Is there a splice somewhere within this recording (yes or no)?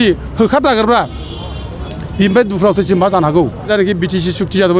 yes